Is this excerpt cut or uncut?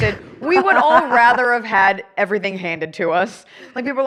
uncut